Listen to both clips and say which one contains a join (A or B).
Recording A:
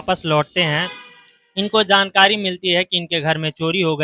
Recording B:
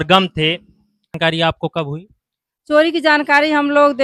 B